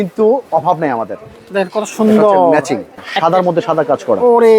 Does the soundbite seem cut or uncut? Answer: cut